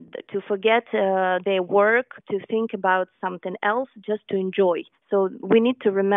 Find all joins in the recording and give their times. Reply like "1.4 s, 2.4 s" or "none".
2.2 s, 4.9 s